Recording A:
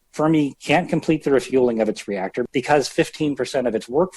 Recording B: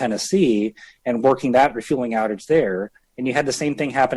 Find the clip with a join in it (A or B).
A